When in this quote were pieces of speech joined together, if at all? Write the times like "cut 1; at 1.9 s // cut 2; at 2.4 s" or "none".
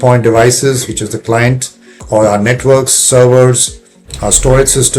cut 1; at 2.0 s // cut 2; at 4.0 s